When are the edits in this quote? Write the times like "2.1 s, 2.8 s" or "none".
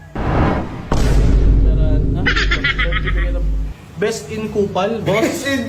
none